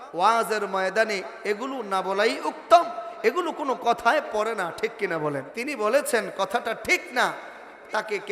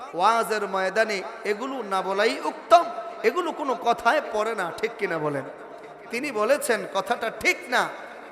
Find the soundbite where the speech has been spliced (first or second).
first